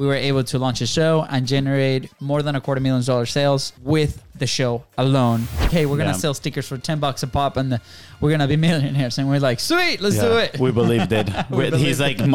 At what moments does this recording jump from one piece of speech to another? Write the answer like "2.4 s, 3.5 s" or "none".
3.7 s, 5.7 s